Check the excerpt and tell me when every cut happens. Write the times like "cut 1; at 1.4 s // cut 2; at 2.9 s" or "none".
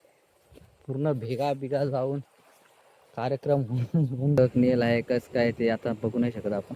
cut 1; at 4.4 s